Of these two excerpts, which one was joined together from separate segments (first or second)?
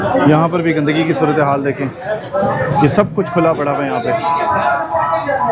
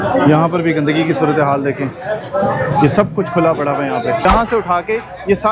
second